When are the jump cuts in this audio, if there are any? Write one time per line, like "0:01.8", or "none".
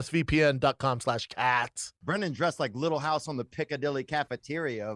0:02.0